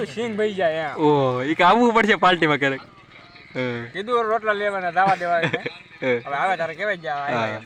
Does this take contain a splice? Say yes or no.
no